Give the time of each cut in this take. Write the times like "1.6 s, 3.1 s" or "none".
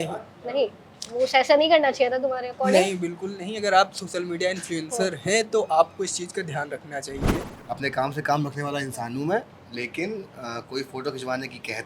7.5 s